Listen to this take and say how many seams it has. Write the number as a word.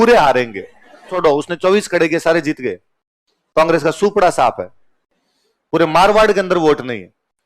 one